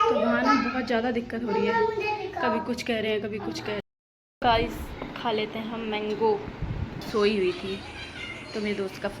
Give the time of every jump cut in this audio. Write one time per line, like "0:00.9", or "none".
0:03.8
0:07.0